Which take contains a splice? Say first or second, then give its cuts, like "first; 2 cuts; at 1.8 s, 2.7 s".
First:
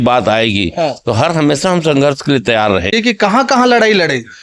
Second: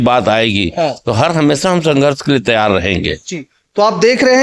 first; 1 cut; at 2.9 s